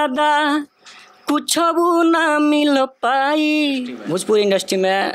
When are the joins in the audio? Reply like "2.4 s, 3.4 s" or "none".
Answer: 3.9 s